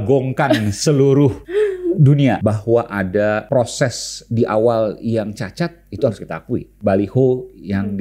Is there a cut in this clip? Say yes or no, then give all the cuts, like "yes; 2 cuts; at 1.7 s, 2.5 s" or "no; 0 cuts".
yes; 4 cuts; at 1.4 s, 2.4 s, 3.4 s, 6.7 s